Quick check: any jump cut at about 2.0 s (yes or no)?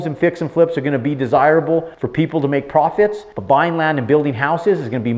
yes